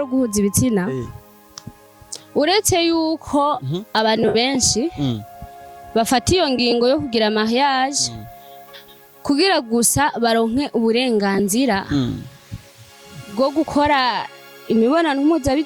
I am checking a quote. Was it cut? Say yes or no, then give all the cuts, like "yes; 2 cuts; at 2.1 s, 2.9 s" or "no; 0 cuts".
no; 0 cuts